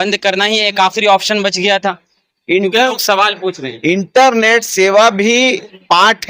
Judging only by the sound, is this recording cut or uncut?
uncut